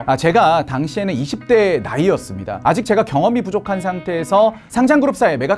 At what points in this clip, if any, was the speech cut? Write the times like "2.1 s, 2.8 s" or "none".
4.6 s